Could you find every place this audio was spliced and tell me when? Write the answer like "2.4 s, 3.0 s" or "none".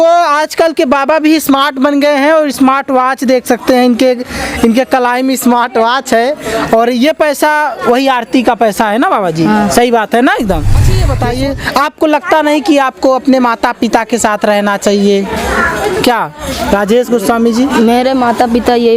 11.1 s